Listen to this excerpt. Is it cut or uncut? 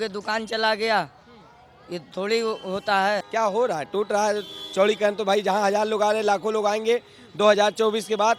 cut